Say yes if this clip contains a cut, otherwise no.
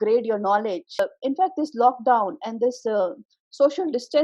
yes